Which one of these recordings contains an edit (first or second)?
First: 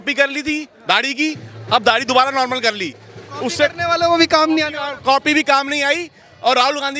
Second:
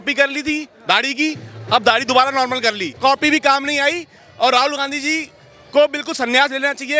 second